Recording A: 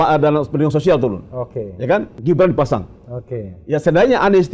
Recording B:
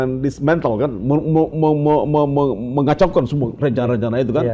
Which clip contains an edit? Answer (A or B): A